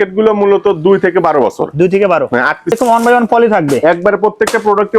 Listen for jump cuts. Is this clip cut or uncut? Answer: cut